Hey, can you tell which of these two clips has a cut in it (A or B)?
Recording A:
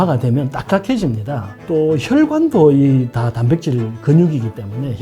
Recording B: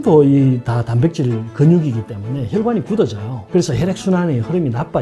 A